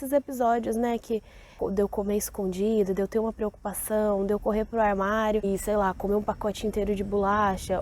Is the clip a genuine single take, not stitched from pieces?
no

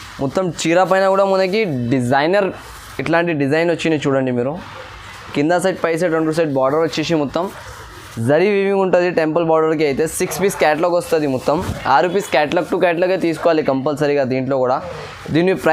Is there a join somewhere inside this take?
no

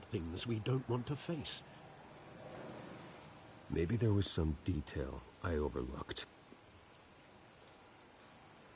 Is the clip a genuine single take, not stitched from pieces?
no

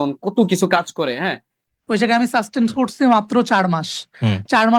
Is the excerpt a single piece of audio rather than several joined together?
no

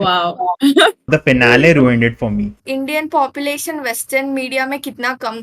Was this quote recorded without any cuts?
no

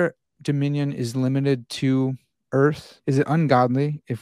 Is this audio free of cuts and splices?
no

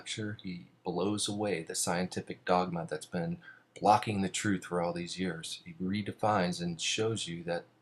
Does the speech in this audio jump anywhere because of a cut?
no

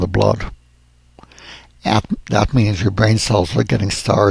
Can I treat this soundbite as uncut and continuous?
yes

